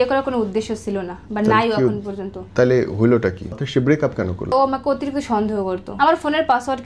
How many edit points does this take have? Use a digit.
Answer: 3